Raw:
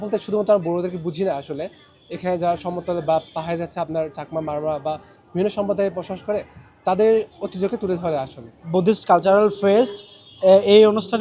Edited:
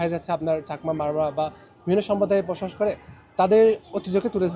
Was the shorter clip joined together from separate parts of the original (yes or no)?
no